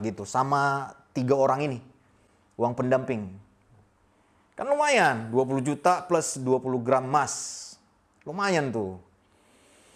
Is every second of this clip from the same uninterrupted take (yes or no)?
yes